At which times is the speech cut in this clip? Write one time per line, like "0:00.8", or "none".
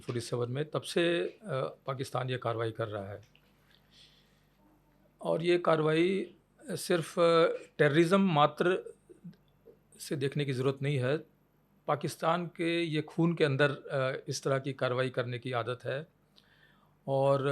none